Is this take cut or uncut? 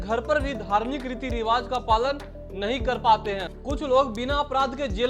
cut